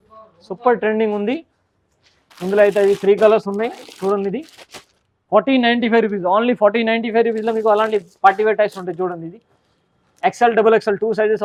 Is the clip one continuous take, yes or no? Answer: yes